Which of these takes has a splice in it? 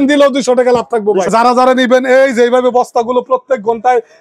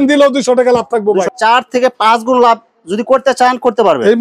first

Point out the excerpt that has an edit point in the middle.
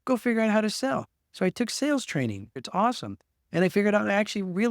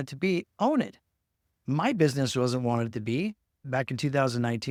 first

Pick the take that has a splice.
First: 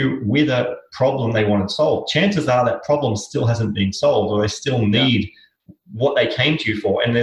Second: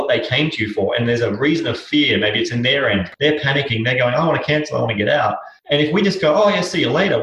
second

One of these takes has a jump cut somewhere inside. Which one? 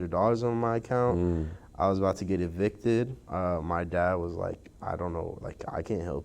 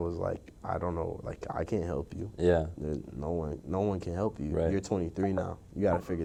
first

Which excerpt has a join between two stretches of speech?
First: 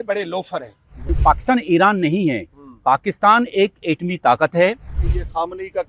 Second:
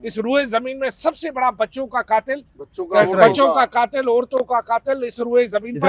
first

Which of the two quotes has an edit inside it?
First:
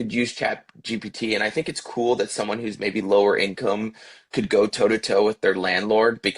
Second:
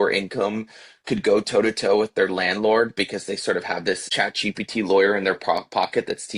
second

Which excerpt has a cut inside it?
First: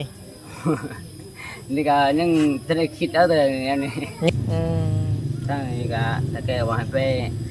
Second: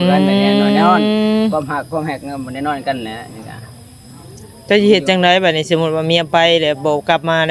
first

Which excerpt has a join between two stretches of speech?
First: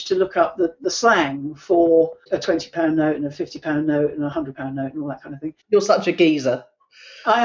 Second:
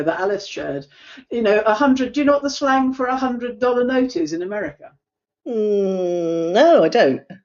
first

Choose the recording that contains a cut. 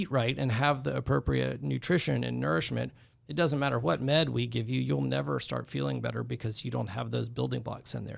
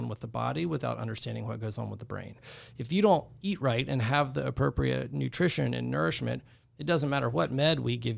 second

